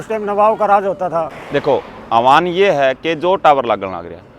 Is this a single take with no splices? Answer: no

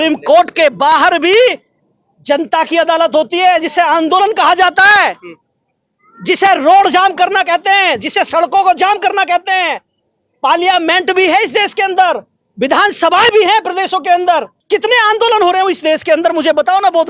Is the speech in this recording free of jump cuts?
no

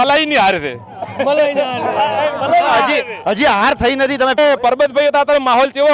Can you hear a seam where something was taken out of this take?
yes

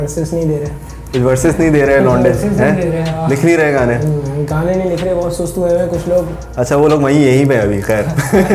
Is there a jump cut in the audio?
no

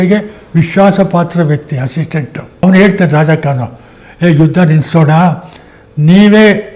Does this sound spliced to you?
yes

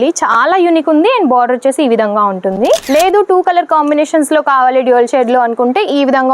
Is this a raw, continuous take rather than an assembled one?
no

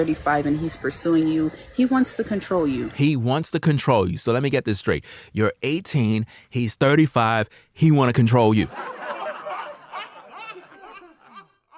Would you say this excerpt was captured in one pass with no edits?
yes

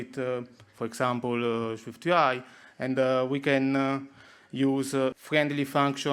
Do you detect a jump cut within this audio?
yes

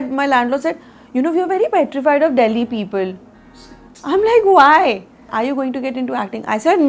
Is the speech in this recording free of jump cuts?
no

